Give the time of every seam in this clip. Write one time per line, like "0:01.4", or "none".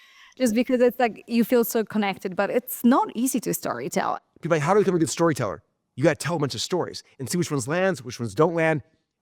0:04.1